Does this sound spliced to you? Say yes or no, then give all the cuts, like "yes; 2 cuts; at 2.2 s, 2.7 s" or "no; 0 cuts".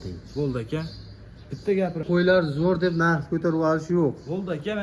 yes; 1 cut; at 2.0 s